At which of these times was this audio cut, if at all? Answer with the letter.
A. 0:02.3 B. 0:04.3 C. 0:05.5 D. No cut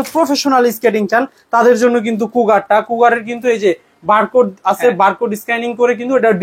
D